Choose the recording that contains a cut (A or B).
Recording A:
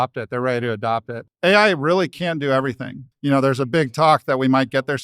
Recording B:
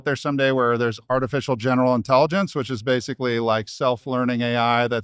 A